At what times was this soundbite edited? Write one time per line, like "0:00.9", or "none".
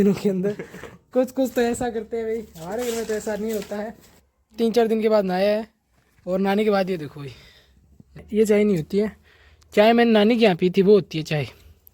0:04.1
0:08.2